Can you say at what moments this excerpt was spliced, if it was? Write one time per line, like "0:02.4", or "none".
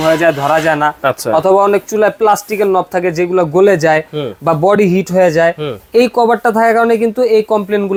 none